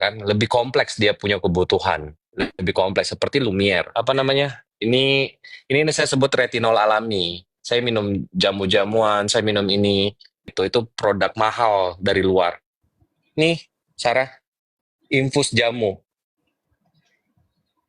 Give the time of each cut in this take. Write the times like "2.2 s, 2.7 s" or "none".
3.9 s, 10.5 s

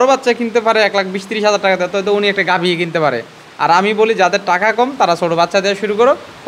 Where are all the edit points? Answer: none

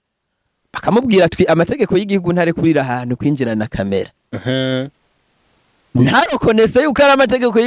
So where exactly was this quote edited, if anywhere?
none

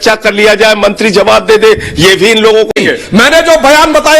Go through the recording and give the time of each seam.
2.7 s

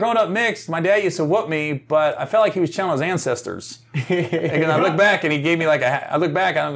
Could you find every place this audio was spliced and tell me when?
none

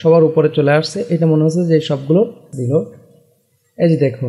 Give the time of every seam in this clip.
2.5 s

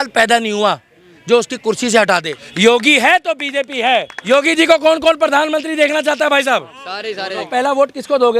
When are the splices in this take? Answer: 2.4 s, 4.2 s, 7.5 s

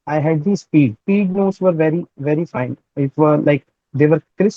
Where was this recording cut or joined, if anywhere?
1.0 s

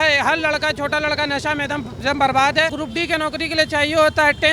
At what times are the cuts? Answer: 2.8 s

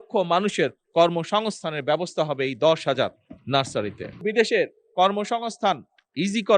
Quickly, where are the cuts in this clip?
4.2 s

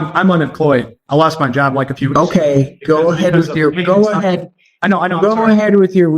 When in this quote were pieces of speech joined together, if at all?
1.0 s

